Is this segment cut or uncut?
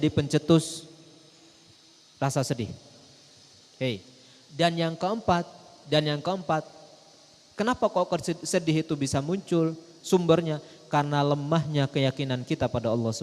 uncut